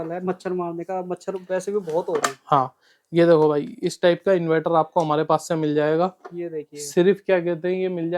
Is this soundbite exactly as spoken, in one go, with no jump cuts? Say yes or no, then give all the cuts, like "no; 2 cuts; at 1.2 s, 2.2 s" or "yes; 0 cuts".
yes; 0 cuts